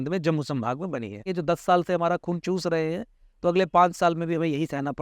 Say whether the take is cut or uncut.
cut